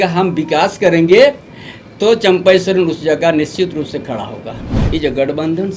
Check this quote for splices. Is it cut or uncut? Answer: cut